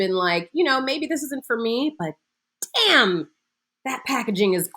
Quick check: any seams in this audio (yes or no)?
no